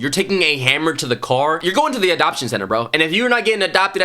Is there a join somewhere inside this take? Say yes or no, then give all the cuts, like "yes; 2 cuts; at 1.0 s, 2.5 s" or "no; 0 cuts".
yes; 1 cut; at 1.6 s